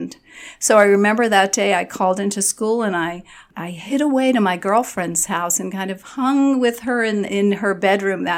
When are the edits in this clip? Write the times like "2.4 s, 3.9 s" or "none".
3.4 s, 7.3 s